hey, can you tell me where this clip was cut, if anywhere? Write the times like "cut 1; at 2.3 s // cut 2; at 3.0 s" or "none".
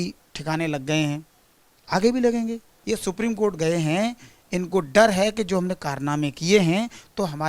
cut 1; at 2.7 s